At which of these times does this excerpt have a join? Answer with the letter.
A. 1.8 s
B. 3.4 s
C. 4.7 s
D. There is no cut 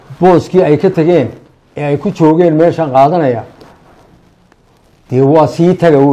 D